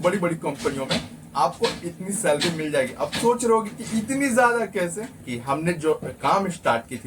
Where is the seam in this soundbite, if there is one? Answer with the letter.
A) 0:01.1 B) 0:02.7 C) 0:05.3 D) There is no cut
C